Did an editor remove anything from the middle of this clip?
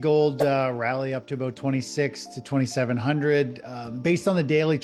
no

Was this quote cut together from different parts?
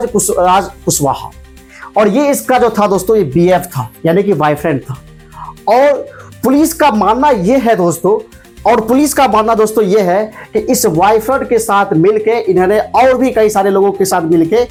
no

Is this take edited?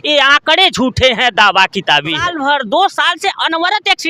yes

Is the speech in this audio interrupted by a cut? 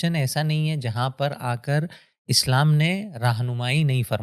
no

